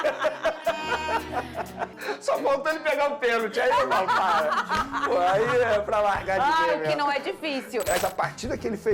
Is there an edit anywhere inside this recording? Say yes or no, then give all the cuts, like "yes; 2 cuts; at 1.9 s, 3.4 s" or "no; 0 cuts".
yes; 2 cuts; at 2.0 s, 7.9 s